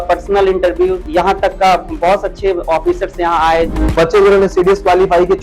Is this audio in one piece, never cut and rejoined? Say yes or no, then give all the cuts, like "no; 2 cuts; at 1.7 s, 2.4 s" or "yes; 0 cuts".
no; 2 cuts; at 1.0 s, 3.8 s